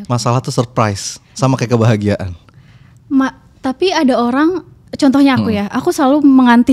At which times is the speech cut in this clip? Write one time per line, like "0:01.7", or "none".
none

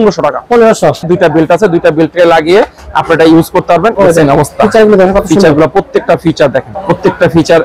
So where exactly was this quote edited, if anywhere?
0:01.1
0:03.9
0:06.7

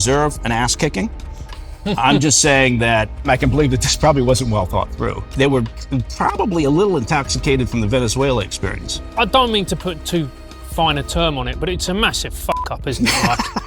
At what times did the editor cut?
0:03.3
0:05.3
0:08.9

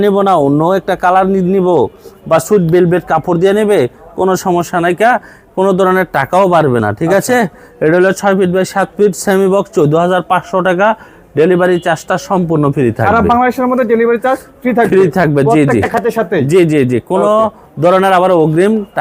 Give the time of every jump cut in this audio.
none

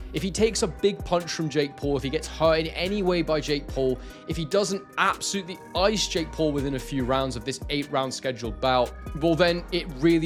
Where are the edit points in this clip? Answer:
none

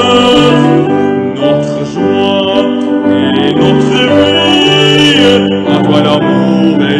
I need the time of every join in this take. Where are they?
none

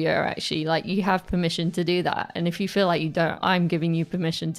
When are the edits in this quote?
0:03.4

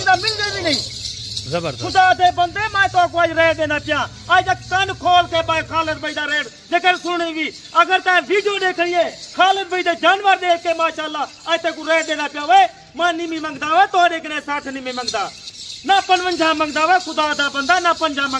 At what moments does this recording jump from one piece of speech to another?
none

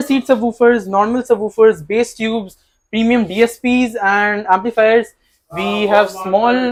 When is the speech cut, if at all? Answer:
none

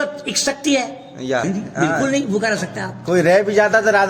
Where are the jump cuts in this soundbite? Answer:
0:01.4

